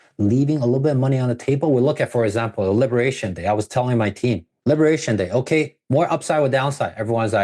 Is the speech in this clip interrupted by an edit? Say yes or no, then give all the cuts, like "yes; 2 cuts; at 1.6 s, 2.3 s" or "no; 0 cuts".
yes; 1 cut; at 4.5 s